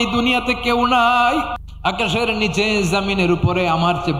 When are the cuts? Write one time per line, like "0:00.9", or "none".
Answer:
0:01.6